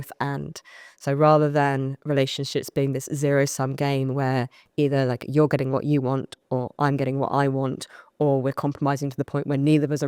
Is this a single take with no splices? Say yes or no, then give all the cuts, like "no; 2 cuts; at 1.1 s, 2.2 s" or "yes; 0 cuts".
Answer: yes; 0 cuts